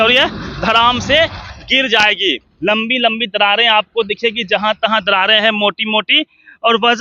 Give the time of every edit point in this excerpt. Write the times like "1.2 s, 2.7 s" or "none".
2.5 s